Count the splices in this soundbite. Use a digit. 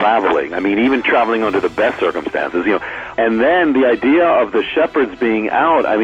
1